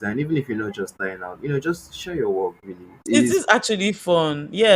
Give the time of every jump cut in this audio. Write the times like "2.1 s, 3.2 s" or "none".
3.1 s